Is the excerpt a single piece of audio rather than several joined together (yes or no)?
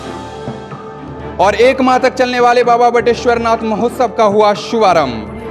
yes